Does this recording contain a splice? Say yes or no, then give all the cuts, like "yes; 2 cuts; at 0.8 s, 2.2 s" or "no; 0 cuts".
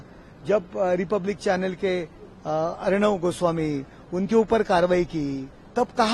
no; 0 cuts